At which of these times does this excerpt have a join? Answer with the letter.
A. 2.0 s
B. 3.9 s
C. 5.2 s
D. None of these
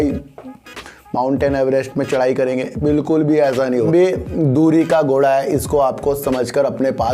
B